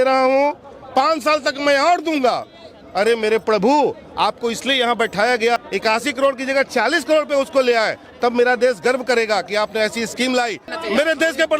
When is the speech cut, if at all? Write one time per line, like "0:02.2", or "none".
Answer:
0:05.6
0:10.7

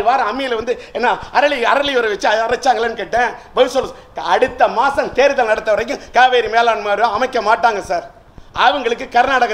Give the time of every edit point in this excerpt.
none

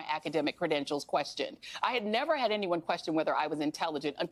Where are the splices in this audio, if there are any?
none

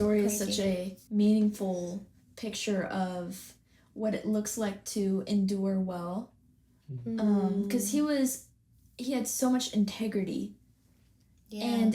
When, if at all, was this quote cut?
0:01.0

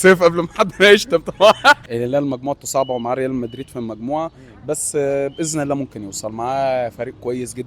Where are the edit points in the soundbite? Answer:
0:01.9

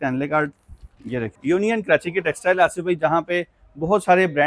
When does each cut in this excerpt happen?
0:01.3

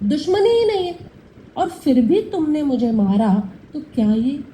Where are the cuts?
0:01.2

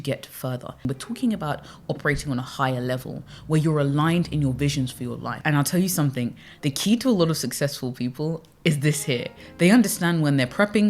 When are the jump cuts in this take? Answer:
0:00.9
0:05.3

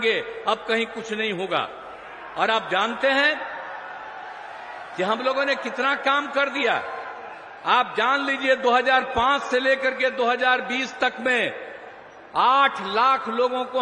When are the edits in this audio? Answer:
none

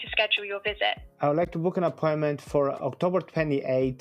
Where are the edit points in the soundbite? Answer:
0:01.1

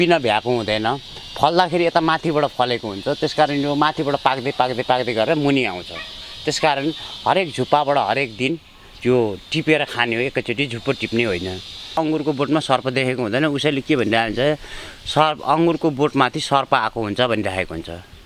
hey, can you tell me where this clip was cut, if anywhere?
0:12.0

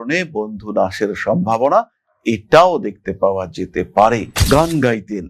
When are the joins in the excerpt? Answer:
0:04.3

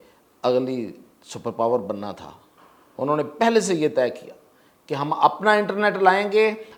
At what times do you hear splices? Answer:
none

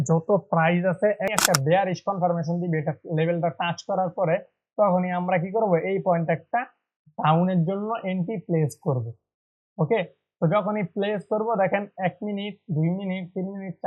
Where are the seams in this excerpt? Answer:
0:01.3

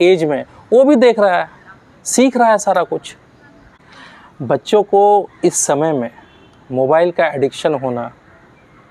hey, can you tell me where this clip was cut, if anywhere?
none

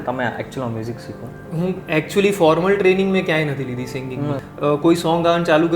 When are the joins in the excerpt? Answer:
0:04.4

